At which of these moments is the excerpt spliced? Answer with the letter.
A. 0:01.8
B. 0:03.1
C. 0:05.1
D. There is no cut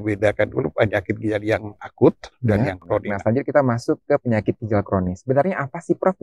B